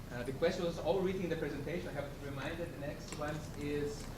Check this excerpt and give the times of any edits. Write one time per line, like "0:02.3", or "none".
0:01.6